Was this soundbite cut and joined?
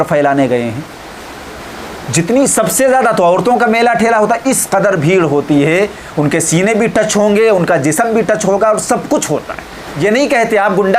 yes; 1 cut; at 9.9 s

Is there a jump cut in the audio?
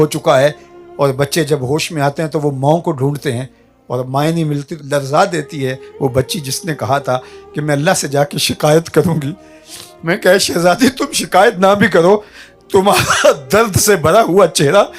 yes; 1 cut; at 4.8 s

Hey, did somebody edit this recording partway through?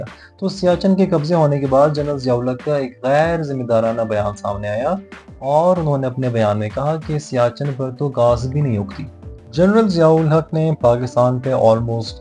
yes; 1 cut; at 9.4 s

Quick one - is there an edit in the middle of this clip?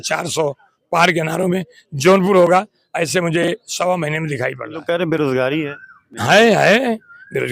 yes; 1 cut; at 4.7 s

